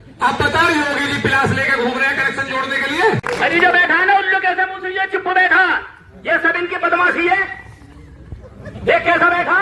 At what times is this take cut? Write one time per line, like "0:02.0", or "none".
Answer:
0:03.2